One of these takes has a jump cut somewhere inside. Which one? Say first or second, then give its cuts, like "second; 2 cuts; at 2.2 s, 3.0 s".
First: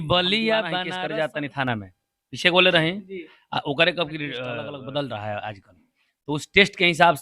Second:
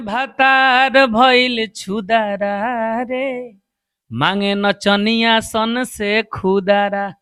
first; 2 cuts; at 0.9 s, 4.6 s